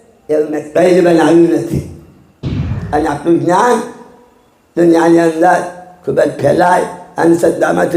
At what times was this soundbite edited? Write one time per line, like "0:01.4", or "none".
0:02.7